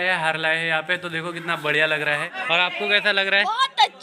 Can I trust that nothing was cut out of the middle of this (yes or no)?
no